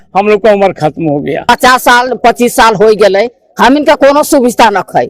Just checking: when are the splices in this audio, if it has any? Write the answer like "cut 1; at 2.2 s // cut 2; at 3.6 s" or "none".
cut 1; at 1.4 s